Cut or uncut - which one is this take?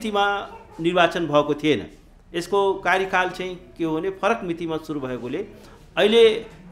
uncut